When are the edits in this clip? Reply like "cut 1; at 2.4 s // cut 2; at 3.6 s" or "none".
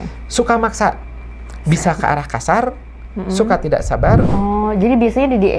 cut 1; at 4.3 s